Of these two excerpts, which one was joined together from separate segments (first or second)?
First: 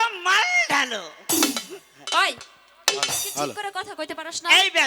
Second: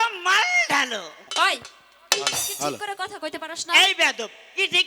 second